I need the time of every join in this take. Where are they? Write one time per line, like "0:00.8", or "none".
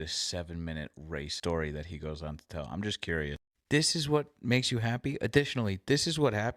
0:01.3